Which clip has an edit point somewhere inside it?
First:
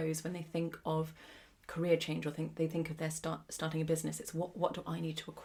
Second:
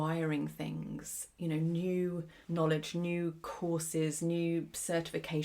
second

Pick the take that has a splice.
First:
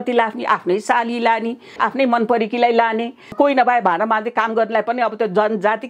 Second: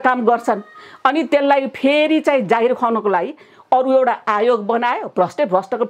first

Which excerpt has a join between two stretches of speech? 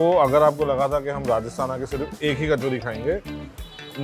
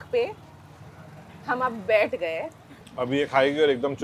second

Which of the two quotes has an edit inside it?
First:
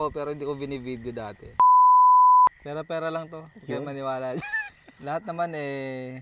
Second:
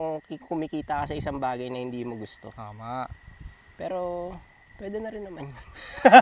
first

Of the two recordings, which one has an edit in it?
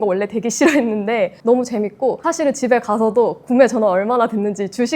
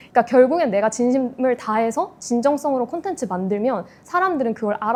first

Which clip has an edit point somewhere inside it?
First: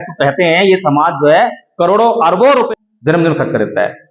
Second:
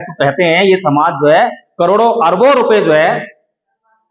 first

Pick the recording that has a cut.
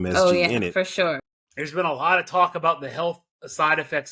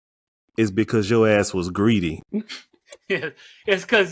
first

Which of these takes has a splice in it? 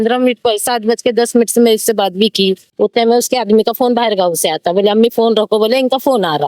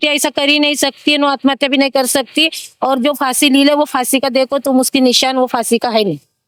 first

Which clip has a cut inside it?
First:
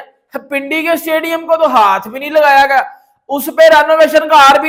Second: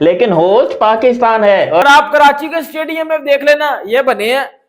second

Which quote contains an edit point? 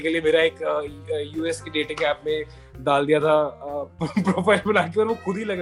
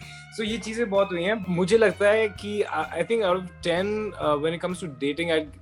second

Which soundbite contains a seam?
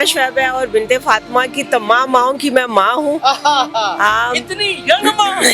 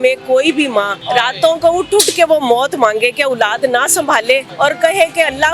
second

